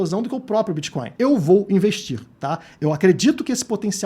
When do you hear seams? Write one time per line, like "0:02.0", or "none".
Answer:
0:01.1